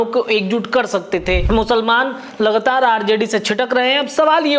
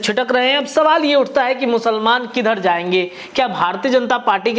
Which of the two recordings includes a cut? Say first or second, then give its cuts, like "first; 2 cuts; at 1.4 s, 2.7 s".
first; 1 cut; at 1.4 s